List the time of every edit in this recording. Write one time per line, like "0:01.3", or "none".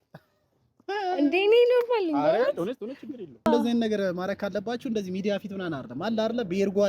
0:03.5